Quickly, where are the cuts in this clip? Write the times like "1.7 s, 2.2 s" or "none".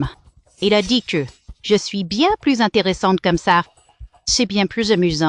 none